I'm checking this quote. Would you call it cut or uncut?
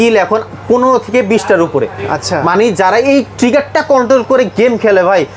uncut